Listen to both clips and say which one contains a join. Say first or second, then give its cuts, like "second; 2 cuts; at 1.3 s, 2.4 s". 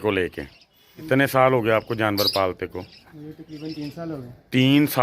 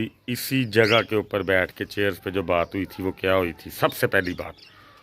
first; 1 cut; at 1.0 s